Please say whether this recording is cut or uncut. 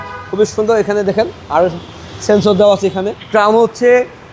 cut